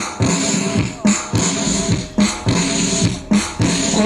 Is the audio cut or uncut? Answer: uncut